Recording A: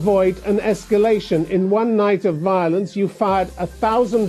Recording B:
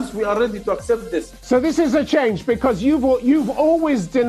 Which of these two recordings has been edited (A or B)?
B